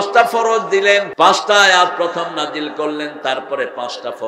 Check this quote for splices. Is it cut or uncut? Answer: cut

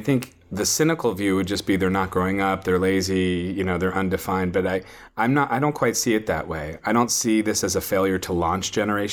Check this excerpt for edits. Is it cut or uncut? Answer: uncut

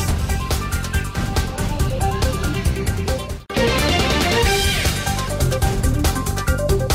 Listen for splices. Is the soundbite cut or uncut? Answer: uncut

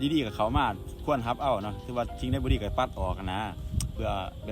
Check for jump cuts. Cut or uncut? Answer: uncut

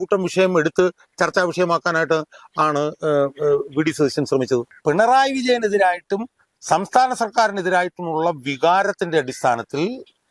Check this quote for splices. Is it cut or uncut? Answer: cut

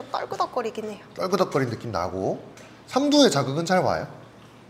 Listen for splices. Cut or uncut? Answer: uncut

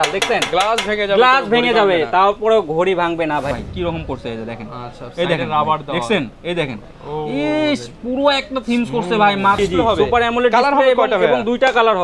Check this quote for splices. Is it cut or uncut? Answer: cut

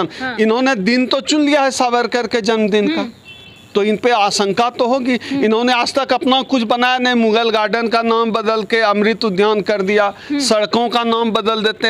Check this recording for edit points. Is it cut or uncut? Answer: uncut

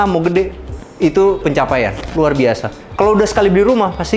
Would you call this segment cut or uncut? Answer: uncut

